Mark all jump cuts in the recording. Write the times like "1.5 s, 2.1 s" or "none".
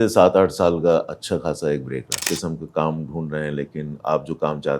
2.2 s